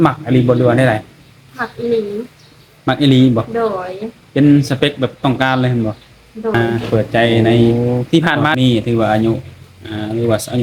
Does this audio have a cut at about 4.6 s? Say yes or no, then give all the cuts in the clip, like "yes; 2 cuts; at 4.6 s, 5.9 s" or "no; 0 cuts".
no; 3 cuts; at 6.5 s, 7.7 s, 8.6 s